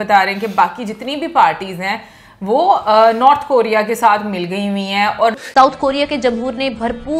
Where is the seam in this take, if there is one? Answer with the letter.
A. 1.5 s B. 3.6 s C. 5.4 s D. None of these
C